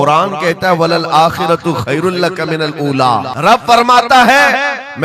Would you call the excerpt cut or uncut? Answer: cut